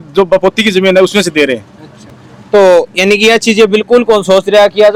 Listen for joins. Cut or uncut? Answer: uncut